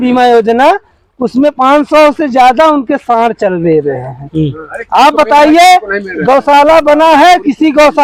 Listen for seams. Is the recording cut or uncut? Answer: uncut